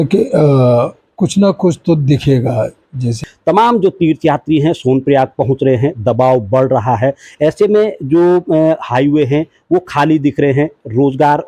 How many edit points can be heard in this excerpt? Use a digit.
1